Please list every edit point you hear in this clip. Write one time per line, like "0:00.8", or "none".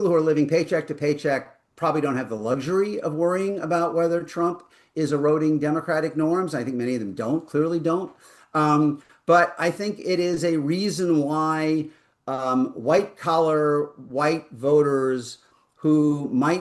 none